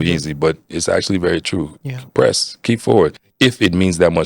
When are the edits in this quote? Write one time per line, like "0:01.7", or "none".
0:03.2